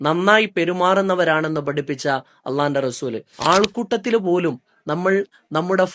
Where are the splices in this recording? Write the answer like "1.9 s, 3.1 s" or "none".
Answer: 3.3 s